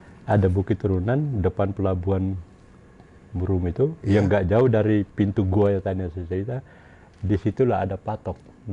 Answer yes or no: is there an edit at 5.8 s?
no